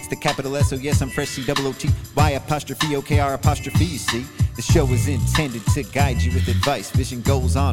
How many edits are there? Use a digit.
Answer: 0